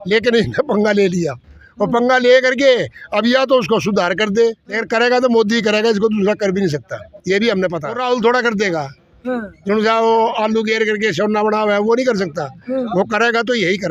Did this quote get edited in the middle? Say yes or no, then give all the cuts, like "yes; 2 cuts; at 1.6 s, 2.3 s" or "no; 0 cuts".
yes; 2 cuts; at 4.7 s, 8.0 s